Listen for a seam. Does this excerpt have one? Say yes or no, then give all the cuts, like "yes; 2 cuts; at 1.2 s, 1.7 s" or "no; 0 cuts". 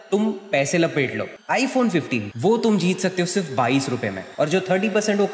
yes; 3 cuts; at 1.4 s, 2.3 s, 4.2 s